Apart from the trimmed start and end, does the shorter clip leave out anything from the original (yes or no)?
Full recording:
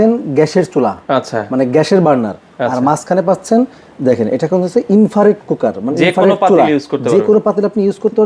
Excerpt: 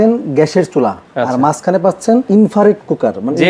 yes